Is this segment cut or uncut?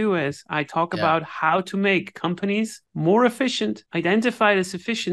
cut